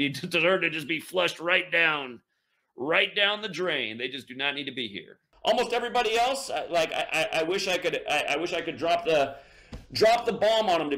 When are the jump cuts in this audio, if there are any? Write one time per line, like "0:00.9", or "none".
none